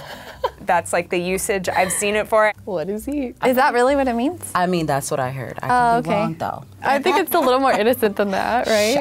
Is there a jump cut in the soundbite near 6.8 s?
no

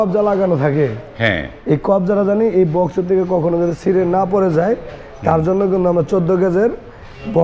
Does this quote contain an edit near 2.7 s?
no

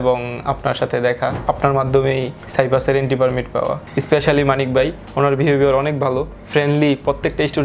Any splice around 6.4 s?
no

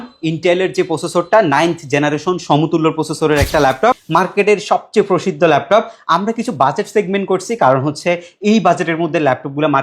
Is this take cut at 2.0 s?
no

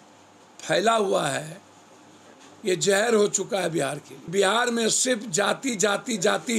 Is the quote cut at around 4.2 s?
yes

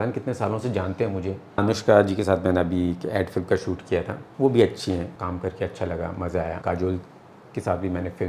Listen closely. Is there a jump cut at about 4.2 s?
yes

